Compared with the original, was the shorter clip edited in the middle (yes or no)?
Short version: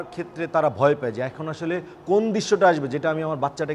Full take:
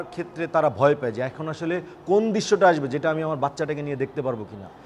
no